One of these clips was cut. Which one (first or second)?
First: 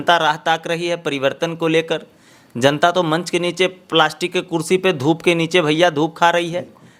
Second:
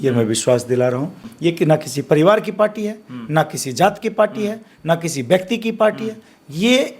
second